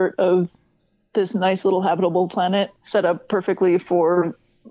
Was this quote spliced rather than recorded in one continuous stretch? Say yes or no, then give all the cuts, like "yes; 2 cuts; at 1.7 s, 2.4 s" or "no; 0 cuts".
yes; 1 cut; at 2.8 s